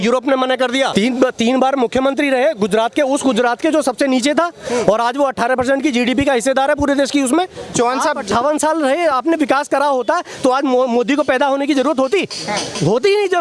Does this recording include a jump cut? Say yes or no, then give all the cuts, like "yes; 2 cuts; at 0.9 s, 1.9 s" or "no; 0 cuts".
yes; 2 cuts; at 0.9 s, 7.7 s